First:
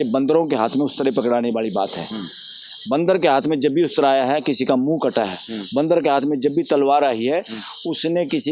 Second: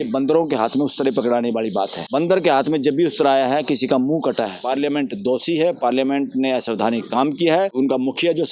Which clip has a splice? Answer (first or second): second